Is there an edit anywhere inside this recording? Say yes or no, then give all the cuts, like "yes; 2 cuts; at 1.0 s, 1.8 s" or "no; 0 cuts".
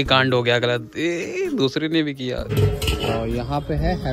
yes; 1 cut; at 2.5 s